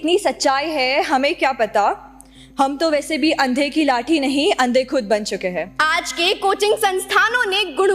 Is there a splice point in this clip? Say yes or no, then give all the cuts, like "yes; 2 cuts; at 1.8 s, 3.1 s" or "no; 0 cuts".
yes; 1 cut; at 5.7 s